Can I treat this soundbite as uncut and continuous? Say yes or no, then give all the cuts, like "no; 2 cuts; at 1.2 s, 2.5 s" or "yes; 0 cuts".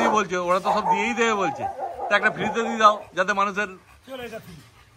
yes; 0 cuts